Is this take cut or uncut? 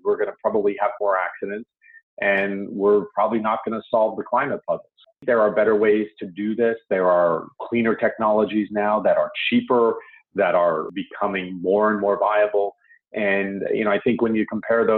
cut